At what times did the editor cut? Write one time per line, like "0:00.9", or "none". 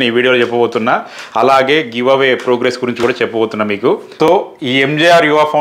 0:04.1